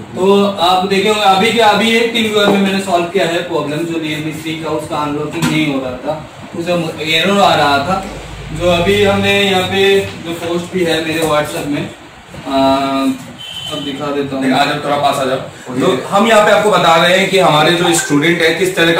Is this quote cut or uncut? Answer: uncut